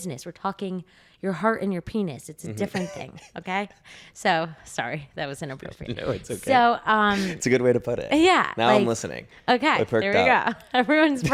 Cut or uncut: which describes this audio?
uncut